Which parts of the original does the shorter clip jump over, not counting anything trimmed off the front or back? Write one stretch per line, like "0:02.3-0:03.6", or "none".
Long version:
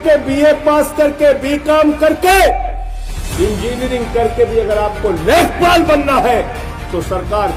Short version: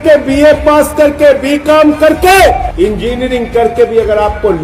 0:02.7-0:03.3

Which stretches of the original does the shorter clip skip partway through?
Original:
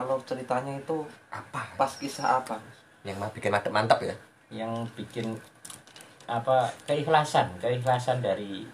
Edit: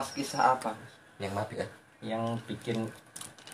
0:03.4-0:04.0

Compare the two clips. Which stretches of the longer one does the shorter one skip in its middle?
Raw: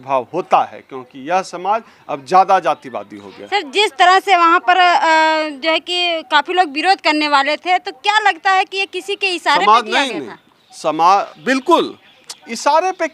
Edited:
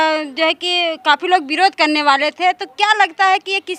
none

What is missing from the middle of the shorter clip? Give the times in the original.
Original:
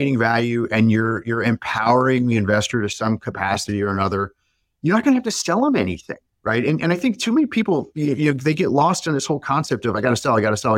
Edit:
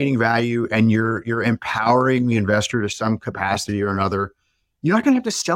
none

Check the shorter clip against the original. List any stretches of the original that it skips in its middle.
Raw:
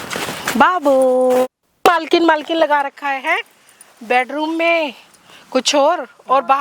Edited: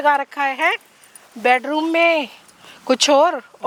none

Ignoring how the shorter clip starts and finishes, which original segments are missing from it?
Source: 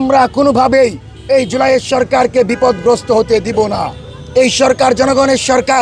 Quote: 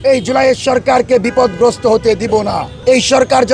0:03.9-0:04.1

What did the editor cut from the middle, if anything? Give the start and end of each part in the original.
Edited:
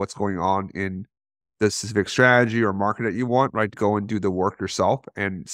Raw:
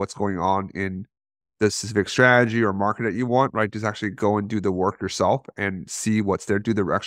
0:03.7-0:04.1

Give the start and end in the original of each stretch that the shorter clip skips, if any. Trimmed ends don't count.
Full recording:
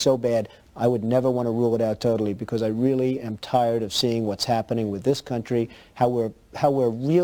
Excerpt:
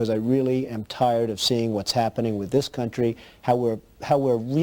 none

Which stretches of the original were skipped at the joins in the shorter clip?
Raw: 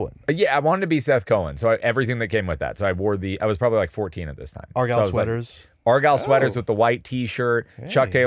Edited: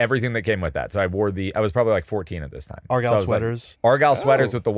0:05.5-0:05.7

